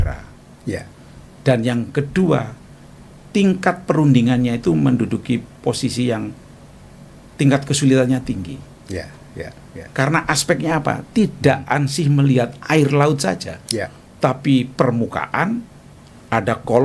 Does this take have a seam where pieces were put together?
no; 0 cuts

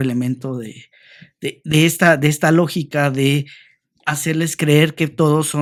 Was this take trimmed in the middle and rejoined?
no; 0 cuts

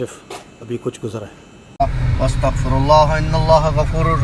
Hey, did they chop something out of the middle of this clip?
yes; 1 cut; at 1.7 s

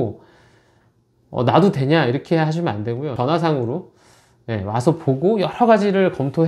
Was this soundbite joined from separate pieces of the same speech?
yes; 1 cut; at 3.1 s

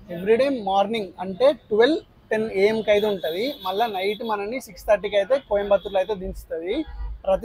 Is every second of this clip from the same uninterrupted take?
yes; 0 cuts

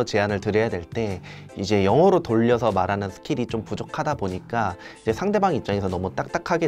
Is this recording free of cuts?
yes; 0 cuts

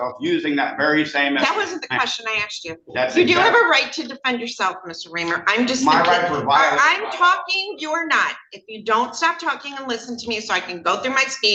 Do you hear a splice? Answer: no; 0 cuts

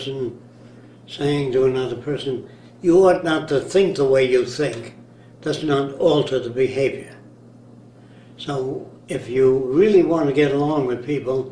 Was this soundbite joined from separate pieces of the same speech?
yes; 1 cut; at 1.5 s

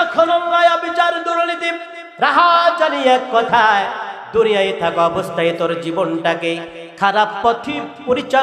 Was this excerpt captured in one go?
yes; 0 cuts

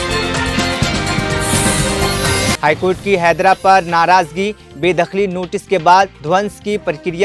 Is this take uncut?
no; 1 cut; at 2.6 s

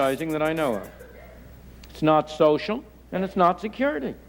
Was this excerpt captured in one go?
yes; 0 cuts

